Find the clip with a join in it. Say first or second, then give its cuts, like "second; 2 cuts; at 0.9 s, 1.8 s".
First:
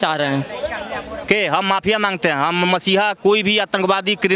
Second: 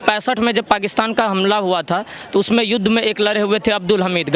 first; 1 cut; at 1.1 s